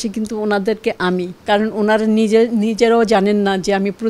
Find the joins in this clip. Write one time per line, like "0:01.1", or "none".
0:01.3